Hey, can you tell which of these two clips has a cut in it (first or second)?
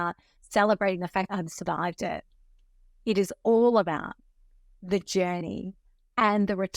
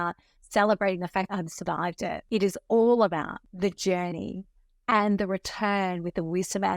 second